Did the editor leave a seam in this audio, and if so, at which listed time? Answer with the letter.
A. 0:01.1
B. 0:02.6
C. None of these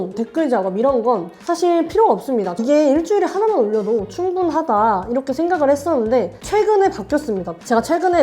B